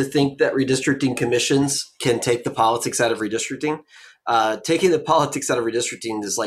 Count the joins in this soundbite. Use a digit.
0